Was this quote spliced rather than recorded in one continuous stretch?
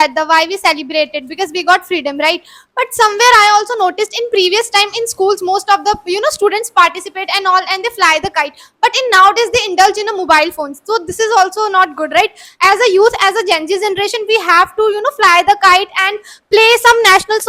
no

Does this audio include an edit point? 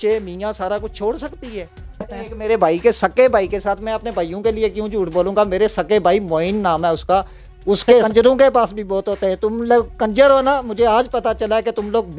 yes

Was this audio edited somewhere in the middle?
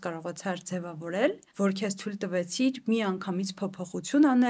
yes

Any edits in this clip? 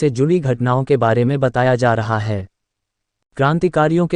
yes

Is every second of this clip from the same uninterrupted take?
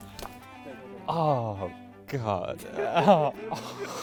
yes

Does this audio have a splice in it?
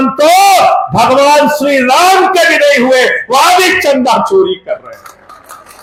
no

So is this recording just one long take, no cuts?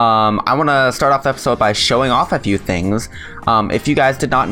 yes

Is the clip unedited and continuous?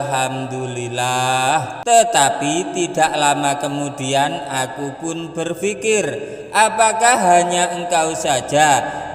no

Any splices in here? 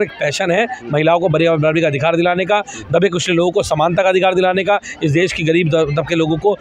no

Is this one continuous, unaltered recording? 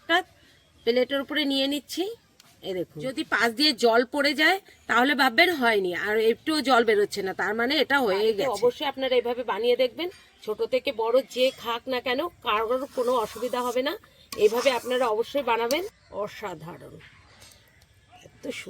no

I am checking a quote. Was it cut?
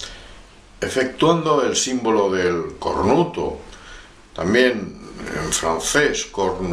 yes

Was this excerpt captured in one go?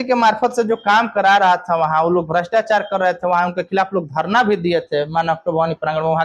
yes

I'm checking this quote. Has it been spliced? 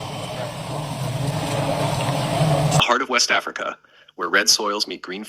yes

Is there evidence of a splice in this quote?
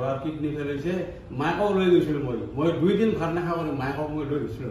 no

